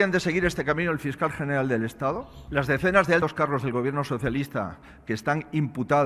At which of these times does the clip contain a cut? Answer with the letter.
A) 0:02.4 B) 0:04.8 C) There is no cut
C